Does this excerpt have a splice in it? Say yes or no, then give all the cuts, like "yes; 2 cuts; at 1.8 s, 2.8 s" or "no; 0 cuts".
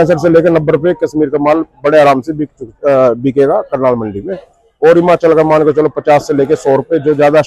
no; 0 cuts